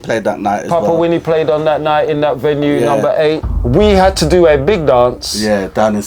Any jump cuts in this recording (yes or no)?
yes